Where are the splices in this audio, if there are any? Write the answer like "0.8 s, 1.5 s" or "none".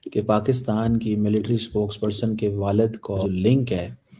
3.2 s